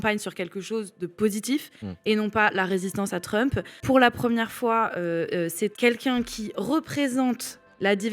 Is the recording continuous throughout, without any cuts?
no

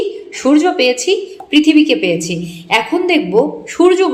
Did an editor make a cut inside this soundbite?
no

